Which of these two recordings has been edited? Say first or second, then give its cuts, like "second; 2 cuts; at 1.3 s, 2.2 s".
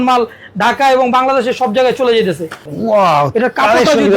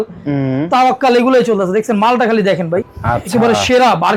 first; 1 cut; at 2.7 s